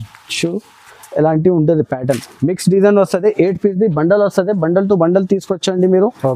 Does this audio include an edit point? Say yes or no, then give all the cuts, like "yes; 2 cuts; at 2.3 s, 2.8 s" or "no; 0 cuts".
yes; 1 cut; at 2.3 s